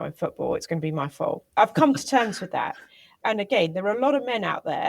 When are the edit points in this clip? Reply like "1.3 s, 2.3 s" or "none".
1.5 s, 3.2 s